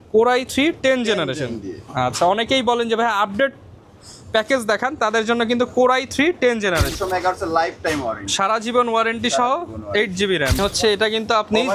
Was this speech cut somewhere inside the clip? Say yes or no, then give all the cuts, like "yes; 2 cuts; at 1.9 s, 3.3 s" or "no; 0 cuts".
yes; 2 cuts; at 6.9 s, 10.6 s